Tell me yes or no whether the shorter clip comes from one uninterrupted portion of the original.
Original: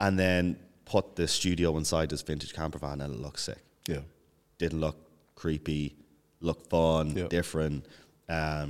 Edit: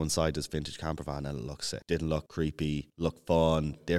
no